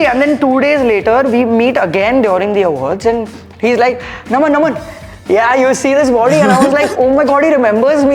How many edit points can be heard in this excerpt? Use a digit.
0